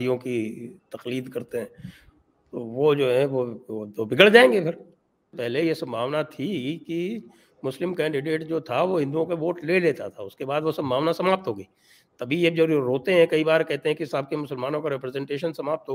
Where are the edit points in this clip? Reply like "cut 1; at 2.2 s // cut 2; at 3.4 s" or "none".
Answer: cut 1; at 5.4 s